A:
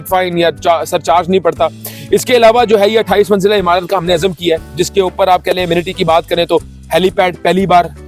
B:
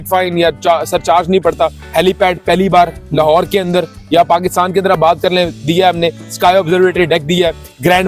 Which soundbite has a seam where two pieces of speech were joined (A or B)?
B